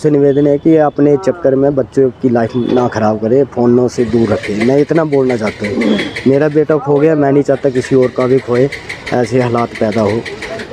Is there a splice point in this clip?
no; 0 cuts

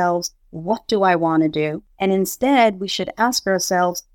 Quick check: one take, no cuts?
no; 1 cut; at 1.8 s

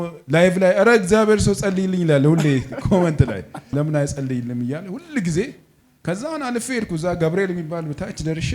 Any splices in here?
yes; 1 cut; at 3.7 s

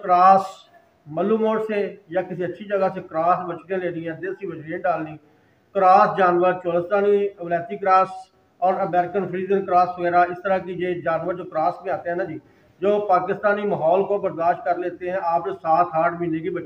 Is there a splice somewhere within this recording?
no; 0 cuts

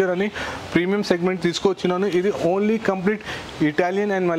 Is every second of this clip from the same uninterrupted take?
yes; 0 cuts

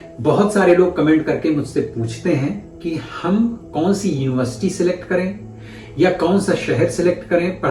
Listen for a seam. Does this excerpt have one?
no; 0 cuts

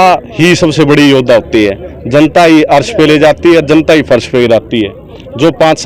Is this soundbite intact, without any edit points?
yes; 0 cuts

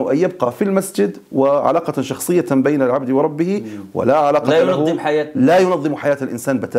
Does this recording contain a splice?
no; 0 cuts

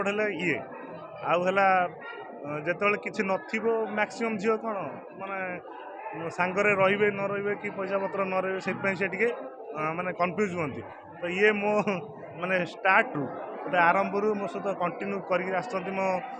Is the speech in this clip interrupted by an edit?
no; 0 cuts

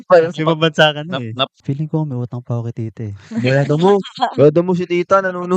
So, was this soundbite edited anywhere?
yes; 1 cut; at 1.6 s

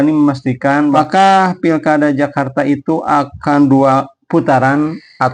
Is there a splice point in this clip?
yes; 1 cut; at 1.0 s

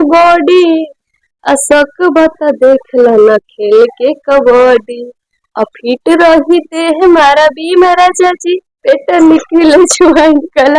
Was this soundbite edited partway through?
no; 0 cuts

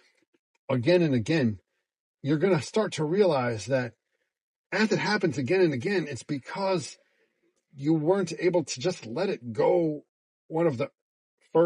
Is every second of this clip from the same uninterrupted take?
yes; 0 cuts

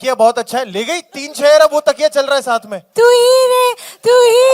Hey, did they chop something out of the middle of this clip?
yes; 1 cut; at 2.8 s

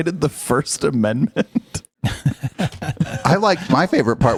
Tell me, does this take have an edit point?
no; 0 cuts

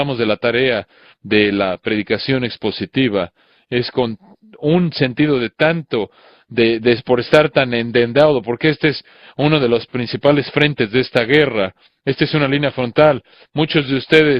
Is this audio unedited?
no; 1 cut; at 7.2 s

